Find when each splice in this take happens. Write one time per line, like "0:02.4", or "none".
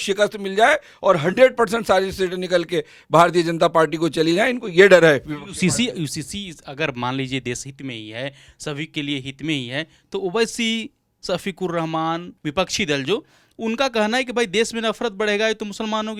none